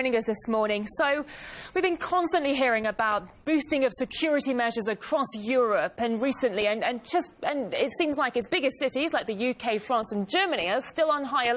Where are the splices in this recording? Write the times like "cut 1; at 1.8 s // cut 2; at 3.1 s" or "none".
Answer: cut 1; at 5.9 s